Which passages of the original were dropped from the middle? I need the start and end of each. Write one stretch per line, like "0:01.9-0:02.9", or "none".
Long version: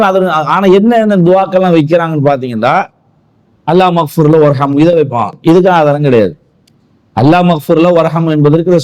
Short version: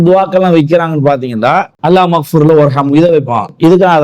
0:02.9-0:03.6

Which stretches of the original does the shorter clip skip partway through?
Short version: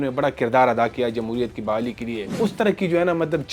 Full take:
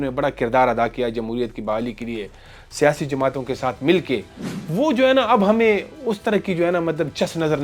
0:02.3-0:05.9

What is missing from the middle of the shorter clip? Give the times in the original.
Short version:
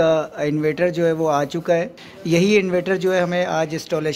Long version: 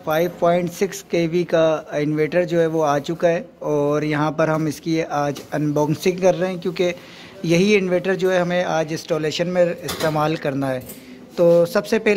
0:03.5-0:07.2

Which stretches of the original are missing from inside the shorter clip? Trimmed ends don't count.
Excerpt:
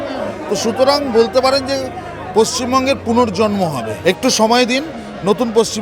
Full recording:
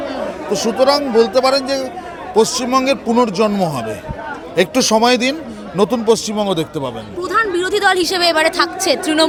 0:03.9-0:04.4

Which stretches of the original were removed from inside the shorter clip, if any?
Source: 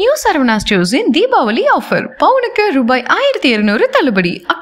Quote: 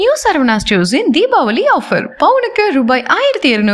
none

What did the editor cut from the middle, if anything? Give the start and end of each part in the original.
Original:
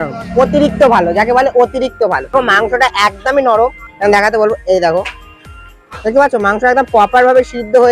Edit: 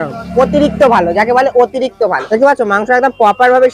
0:02.2-0:05.9

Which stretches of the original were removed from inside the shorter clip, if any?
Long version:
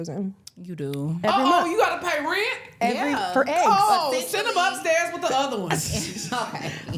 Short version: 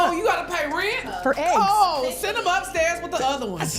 0:02.7-0:03.2

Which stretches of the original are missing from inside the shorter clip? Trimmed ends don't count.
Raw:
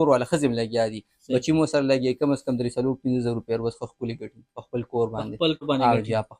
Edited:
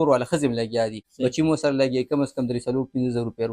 0:01.0-0:01.1

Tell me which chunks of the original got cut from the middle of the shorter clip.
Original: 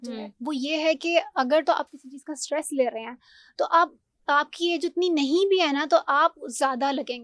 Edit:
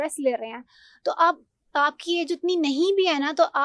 none

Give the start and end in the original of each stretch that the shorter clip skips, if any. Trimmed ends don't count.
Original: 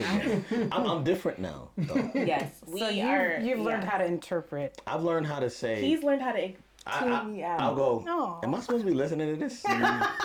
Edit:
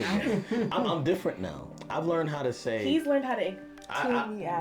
0:01.8-0:04.7

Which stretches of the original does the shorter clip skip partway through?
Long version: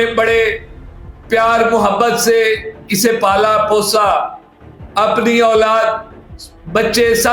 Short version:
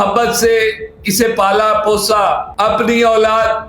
0:04.3-0:04.8

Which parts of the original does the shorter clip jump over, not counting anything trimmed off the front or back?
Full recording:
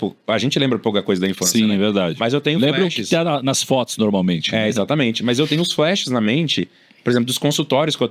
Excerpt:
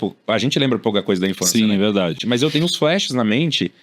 0:02.2-0:05.1

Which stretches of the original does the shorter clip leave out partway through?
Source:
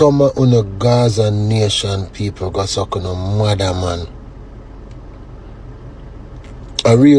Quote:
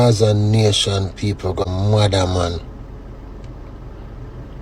0:02.7-0:03.2

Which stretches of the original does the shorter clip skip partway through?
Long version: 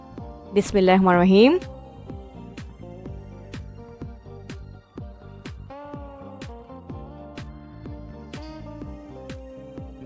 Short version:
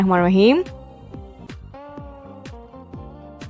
0:02.4-0:05.4

